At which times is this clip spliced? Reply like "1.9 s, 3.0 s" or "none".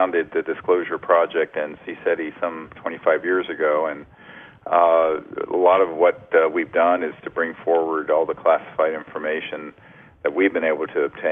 none